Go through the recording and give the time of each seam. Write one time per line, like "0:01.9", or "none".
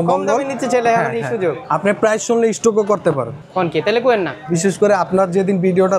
0:01.6
0:03.4
0:04.4